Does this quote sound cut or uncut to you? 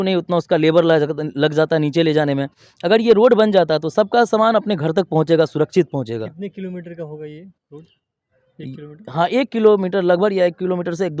uncut